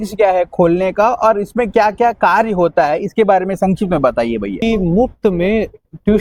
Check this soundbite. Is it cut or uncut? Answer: cut